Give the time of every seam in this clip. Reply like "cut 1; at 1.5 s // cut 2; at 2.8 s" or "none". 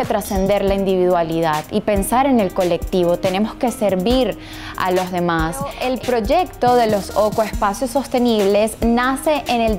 cut 1; at 5.8 s